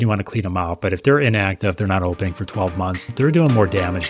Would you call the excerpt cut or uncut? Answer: cut